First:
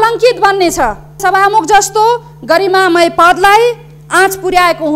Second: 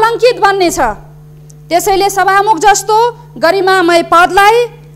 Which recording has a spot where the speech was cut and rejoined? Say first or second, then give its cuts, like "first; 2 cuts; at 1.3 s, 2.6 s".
first; 1 cut; at 1.2 s